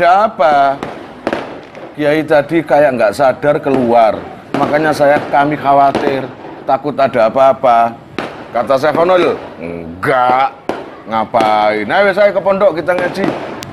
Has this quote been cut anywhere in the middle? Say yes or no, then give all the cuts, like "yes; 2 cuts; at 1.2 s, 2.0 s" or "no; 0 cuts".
no; 0 cuts